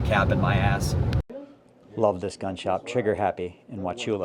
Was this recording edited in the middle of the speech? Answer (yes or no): yes